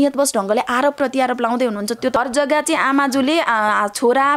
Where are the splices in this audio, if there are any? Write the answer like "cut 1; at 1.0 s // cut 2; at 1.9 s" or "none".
cut 1; at 2.2 s